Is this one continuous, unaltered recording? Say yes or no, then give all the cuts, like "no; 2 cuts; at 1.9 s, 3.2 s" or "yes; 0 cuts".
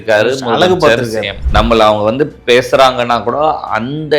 no; 1 cut; at 1.4 s